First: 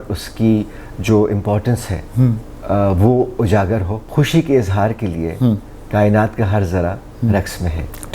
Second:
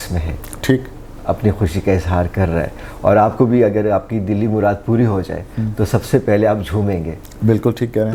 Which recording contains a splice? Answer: first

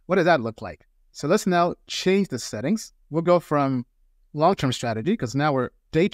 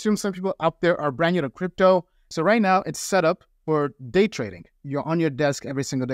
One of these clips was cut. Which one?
second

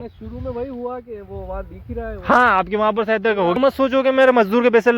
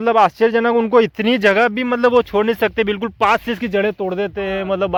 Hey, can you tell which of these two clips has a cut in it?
first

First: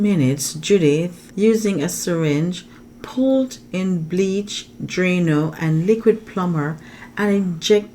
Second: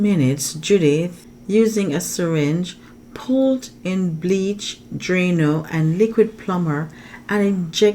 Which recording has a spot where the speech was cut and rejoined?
first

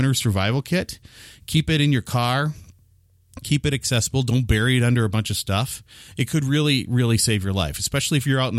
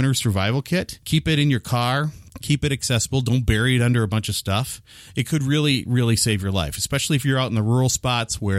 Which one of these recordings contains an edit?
second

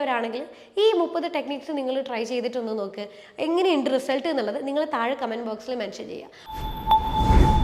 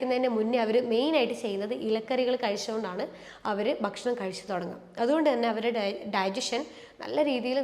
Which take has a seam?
first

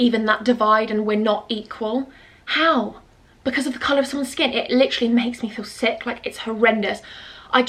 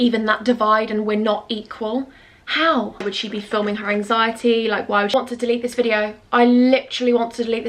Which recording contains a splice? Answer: second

